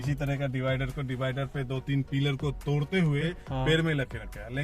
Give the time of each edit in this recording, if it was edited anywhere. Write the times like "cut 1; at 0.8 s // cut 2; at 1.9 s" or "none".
cut 1; at 3.4 s